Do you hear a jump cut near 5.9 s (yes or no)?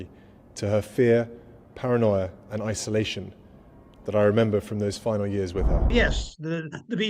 yes